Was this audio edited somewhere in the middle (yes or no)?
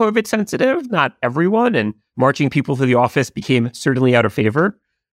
yes